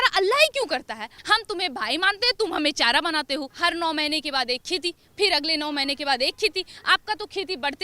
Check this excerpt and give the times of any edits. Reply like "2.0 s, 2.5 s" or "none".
1.1 s, 3.5 s